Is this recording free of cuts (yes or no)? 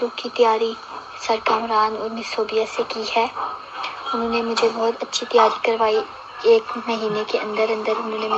yes